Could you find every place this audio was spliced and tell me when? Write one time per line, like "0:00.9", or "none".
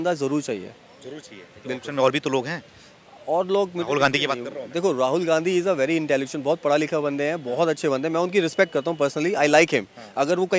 none